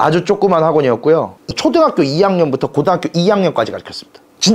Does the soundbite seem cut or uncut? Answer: cut